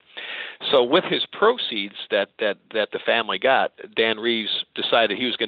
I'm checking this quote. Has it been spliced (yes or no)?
no